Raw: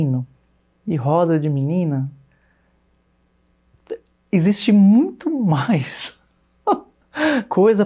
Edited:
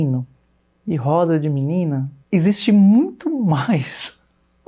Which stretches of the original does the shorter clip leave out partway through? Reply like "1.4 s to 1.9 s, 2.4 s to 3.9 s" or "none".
2.1 s to 4.1 s